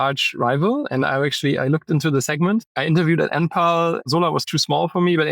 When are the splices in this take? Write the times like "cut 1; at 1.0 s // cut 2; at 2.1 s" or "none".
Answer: cut 1; at 2.7 s // cut 2; at 4.0 s